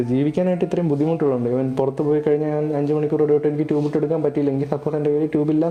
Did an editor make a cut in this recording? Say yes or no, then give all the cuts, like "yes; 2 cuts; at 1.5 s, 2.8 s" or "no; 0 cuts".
no; 0 cuts